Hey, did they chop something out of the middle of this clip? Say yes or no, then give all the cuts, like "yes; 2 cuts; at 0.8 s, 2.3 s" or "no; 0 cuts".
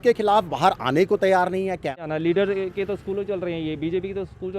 yes; 1 cut; at 1.5 s